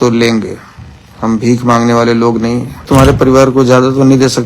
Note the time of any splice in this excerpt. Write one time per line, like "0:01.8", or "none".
0:02.9